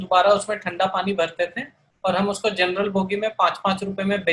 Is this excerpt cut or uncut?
uncut